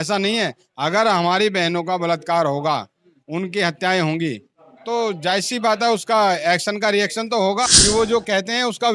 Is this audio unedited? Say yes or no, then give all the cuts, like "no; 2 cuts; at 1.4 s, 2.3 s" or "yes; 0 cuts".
no; 1 cut; at 7.7 s